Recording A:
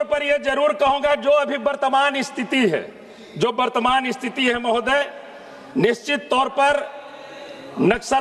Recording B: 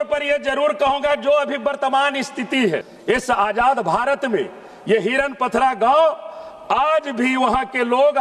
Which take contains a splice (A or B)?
B